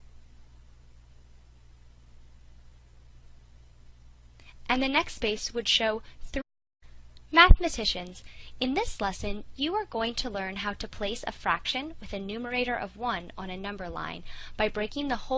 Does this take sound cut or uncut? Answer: uncut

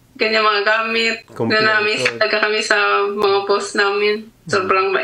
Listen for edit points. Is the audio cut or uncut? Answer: uncut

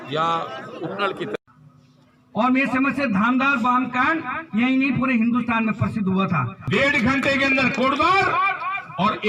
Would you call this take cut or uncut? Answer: cut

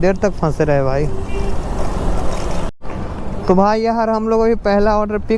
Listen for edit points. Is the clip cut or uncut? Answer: cut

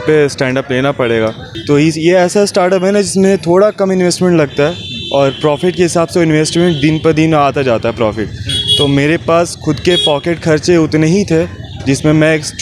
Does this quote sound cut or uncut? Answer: cut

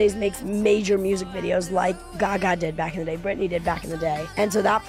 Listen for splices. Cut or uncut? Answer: uncut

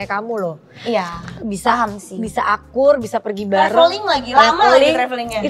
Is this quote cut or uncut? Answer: uncut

